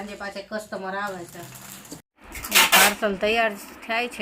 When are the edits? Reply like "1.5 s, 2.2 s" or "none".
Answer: 2.0 s